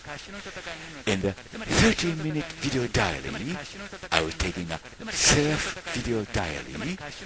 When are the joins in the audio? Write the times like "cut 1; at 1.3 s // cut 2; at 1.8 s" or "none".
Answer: none